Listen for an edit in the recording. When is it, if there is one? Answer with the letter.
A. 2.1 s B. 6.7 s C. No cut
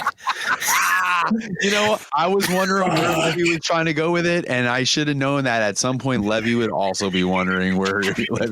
A